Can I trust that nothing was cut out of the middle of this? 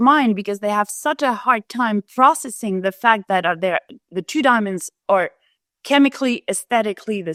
yes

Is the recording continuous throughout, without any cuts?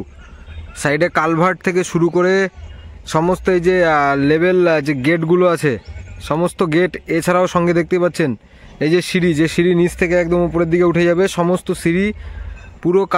yes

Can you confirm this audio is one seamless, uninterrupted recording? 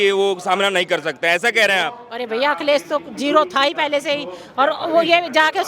yes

